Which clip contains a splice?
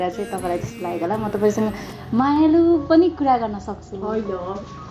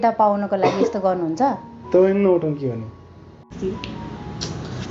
second; 1 cut; at 3.5 s

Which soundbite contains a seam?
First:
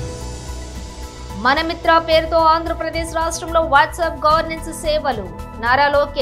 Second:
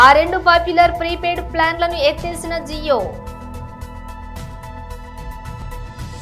first; 1 cut; at 0.9 s

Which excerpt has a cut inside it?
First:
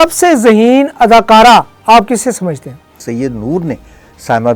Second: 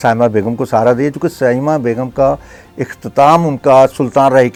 first; 1 cut; at 3.0 s

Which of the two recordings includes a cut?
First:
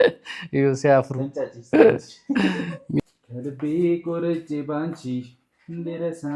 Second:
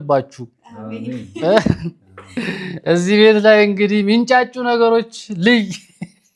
first; 1 cut; at 3.0 s

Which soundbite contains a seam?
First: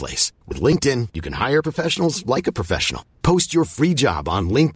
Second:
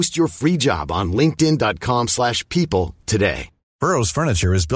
second; 1 cut; at 3.6 s

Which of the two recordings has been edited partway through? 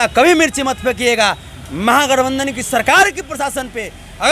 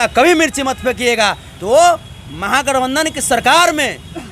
second; 1 cut; at 1.5 s

